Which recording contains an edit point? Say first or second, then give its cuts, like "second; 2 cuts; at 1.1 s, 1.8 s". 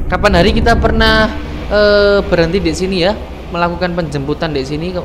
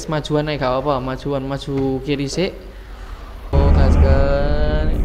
second; 1 cut; at 3.5 s